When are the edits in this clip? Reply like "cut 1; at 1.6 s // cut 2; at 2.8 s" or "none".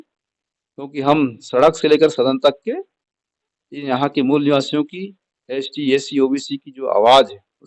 none